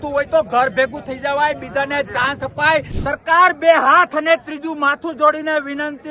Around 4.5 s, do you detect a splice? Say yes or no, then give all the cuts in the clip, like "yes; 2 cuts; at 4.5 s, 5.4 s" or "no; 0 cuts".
no; 1 cut; at 3.0 s